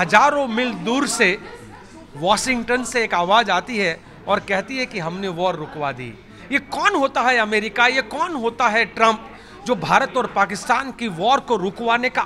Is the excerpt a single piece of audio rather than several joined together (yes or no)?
yes